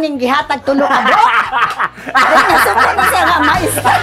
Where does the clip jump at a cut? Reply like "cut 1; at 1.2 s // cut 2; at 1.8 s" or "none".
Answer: none